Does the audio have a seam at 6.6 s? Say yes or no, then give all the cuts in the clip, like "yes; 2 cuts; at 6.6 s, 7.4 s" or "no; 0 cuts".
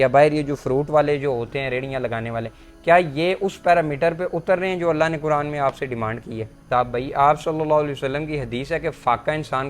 yes; 1 cut; at 6.6 s